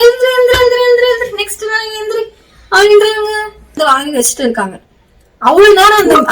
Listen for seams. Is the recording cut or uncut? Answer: cut